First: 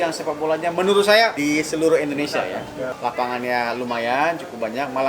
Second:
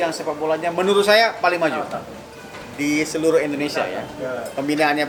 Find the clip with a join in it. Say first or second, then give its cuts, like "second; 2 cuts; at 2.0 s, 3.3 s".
first; 2 cuts; at 1.3 s, 2.9 s